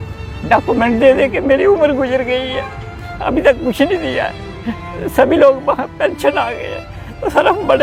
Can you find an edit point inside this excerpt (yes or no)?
no